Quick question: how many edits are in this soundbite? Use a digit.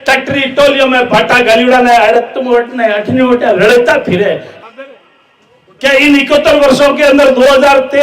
1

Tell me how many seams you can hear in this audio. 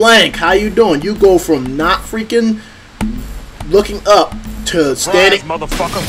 0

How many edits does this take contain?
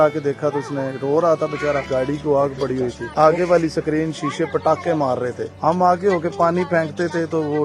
3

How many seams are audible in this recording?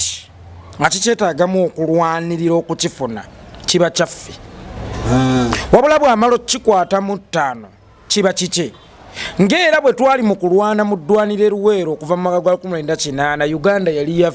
0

